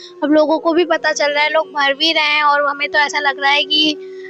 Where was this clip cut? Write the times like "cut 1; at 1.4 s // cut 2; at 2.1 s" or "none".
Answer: none